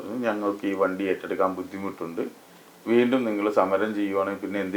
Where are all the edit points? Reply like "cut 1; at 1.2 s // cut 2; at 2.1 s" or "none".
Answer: none

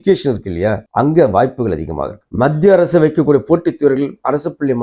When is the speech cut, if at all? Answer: cut 1; at 2.2 s

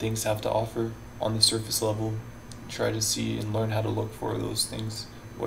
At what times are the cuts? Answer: cut 1; at 1.0 s

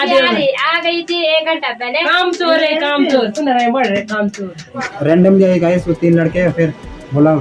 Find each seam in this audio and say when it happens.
cut 1; at 4.8 s

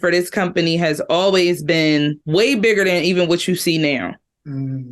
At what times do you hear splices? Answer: none

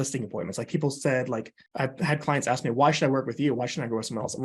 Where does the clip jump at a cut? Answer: cut 1; at 1.6 s

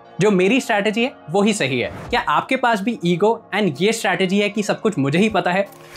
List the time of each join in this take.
cut 1; at 2.0 s

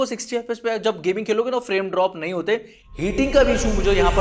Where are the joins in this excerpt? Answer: none

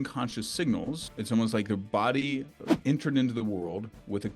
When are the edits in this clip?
cut 1; at 1.0 s // cut 2; at 2.7 s

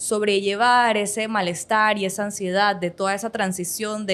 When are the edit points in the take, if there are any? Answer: none

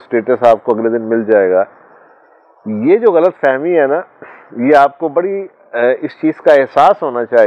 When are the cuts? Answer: none

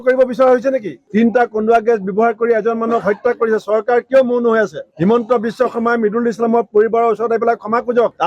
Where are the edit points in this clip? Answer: cut 1; at 1.0 s

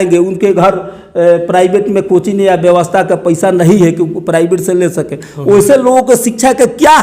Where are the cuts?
none

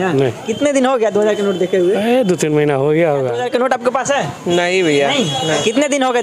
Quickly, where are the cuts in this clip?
cut 1; at 3.4 s

